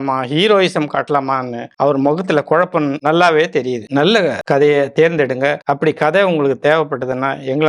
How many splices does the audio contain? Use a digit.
2